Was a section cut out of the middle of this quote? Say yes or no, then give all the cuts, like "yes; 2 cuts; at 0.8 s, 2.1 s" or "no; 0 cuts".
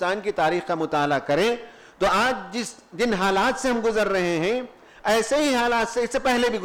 no; 0 cuts